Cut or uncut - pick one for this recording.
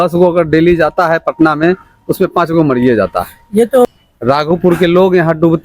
cut